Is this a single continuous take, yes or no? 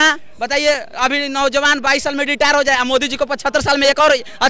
yes